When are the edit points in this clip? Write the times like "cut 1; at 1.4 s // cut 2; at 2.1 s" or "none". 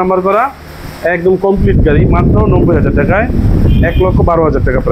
cut 1; at 3.6 s